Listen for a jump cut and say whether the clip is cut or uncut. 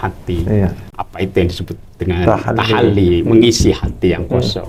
uncut